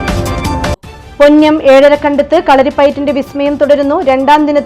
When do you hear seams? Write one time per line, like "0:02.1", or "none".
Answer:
0:00.9